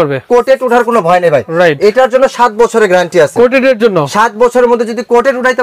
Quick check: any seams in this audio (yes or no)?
no